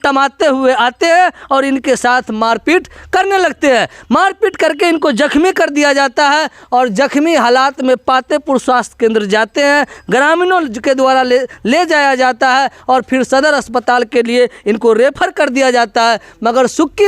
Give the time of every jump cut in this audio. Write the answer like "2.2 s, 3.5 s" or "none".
none